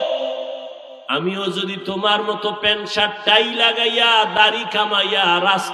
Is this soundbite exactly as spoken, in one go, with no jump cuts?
yes; 0 cuts

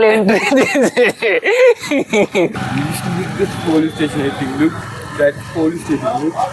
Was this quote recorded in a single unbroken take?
no; 1 cut; at 2.6 s

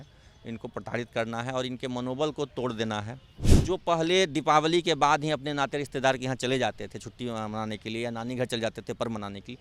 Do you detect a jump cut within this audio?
yes; 1 cut; at 3.5 s

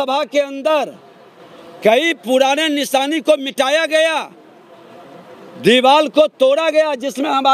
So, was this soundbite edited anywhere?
no; 0 cuts

